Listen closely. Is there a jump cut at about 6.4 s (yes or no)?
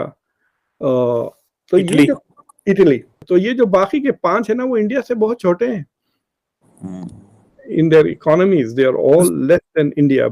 no